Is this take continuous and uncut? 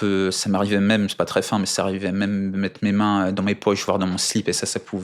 yes; 0 cuts

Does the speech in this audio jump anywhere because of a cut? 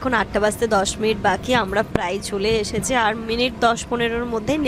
no; 0 cuts

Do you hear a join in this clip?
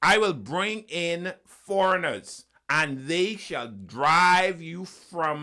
no; 0 cuts

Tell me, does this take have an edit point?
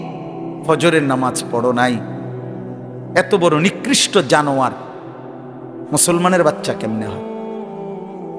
yes; 1 cut; at 7.4 s

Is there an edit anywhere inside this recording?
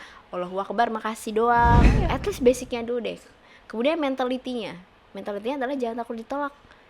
yes; 1 cut; at 1.9 s

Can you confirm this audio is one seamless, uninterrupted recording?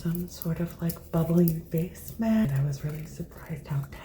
no; 1 cut; at 2.4 s

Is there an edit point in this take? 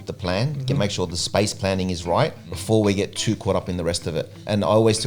yes; 1 cut; at 2.5 s

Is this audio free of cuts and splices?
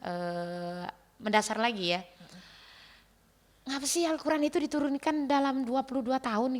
yes; 0 cuts

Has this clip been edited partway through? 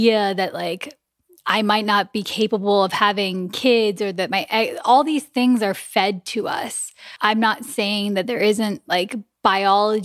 yes; 1 cut; at 6.9 s

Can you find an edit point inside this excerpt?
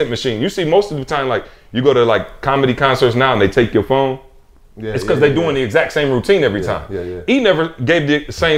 no; 0 cuts

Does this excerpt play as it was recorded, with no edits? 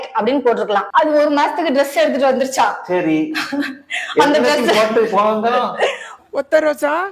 no; 2 cuts; at 0.9 s, 6.2 s

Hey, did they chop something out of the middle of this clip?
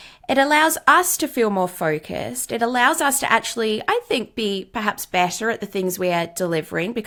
no; 0 cuts

